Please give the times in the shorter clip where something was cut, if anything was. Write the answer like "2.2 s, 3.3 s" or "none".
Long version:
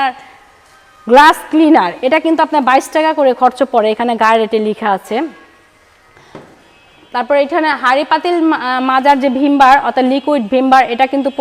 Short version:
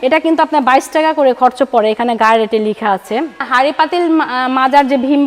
3.5 s